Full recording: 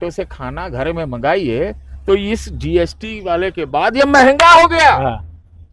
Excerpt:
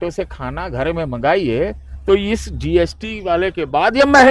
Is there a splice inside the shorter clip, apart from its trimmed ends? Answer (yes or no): no